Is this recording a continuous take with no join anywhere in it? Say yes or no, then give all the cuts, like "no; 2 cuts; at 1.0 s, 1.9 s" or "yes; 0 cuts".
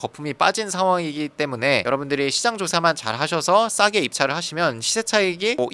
yes; 0 cuts